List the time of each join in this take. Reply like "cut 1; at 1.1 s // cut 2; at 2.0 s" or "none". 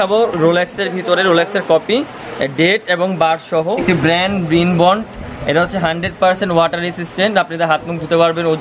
cut 1; at 3.8 s